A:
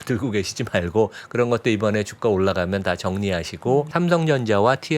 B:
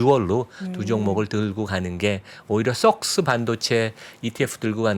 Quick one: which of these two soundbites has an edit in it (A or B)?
A